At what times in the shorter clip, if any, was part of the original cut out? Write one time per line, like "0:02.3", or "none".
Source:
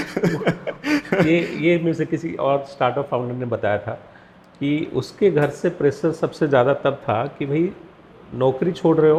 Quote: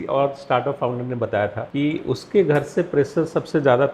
0:01.6